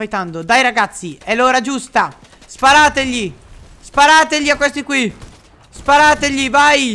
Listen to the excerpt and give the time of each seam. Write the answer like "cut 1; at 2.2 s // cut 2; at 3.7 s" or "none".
none

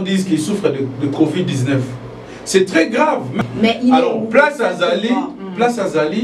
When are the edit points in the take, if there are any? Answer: cut 1; at 3.3 s

